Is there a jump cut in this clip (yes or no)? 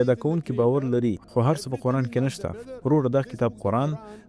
yes